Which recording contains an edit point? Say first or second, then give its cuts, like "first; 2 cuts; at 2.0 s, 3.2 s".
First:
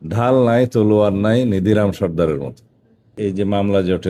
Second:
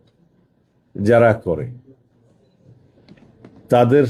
first; 1 cut; at 3.1 s